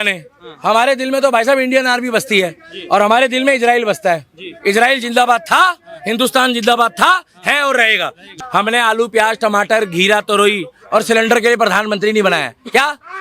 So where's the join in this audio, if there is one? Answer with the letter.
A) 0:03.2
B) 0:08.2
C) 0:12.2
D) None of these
B